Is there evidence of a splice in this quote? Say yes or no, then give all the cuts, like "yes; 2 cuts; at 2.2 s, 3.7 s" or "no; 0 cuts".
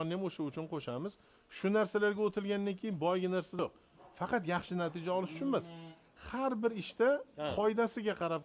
yes; 1 cut; at 3.6 s